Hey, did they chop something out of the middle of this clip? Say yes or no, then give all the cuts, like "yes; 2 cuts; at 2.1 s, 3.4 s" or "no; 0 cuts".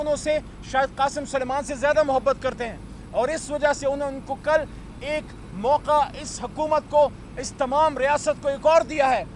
no; 0 cuts